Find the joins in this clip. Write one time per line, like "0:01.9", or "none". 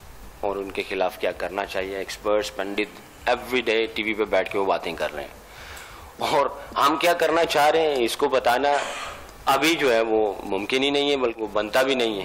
0:11.4